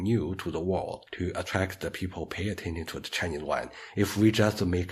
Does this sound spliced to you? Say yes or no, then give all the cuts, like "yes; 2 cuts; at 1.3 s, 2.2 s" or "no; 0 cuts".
yes; 1 cut; at 1.0 s